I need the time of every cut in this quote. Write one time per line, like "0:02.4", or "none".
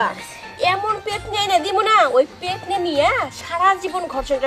none